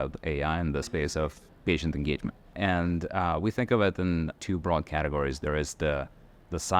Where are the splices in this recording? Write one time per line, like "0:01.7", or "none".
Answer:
0:01.0
0:02.4